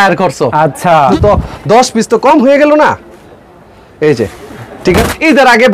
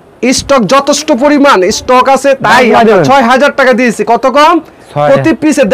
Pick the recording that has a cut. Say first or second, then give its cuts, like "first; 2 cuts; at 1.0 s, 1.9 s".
first; 2 cuts; at 1.1 s, 5.0 s